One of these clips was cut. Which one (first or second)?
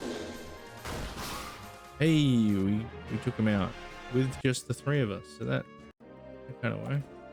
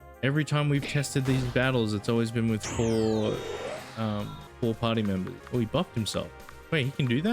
second